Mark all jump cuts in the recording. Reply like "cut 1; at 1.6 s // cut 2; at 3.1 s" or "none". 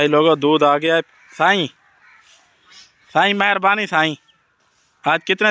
cut 1; at 1.1 s